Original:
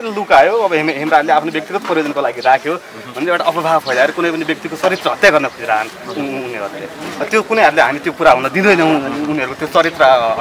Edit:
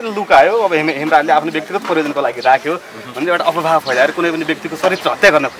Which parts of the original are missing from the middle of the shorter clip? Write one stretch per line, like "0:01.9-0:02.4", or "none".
none